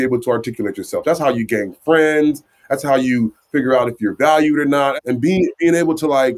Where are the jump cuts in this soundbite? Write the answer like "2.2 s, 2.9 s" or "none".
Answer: 5.0 s